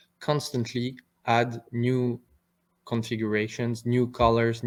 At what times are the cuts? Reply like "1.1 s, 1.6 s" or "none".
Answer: none